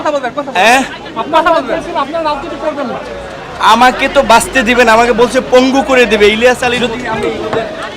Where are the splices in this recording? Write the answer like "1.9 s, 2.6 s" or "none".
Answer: 6.7 s